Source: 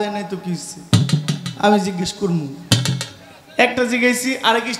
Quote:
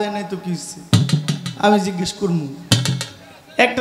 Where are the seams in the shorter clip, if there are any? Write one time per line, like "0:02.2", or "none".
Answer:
none